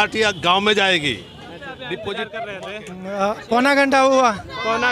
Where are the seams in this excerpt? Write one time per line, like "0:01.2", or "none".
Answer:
0:02.4